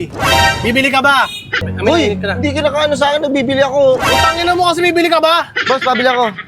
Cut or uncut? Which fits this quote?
cut